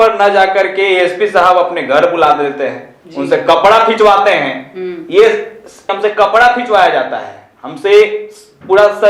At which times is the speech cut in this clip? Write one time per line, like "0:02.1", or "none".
0:05.9